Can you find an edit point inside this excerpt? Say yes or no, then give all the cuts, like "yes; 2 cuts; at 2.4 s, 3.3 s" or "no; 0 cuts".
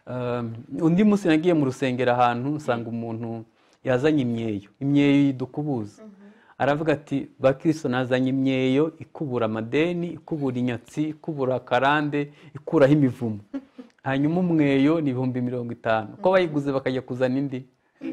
no; 0 cuts